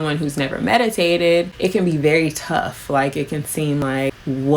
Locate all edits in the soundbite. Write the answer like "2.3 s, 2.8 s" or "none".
1.5 s, 3.8 s